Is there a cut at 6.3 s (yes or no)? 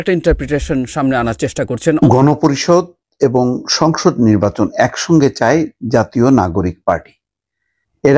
no